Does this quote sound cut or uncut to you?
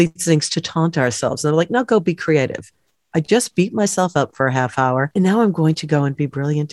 uncut